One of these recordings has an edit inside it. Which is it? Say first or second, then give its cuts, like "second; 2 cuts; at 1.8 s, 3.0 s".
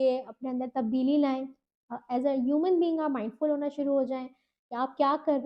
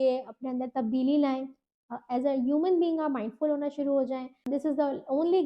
second; 1 cut; at 4.4 s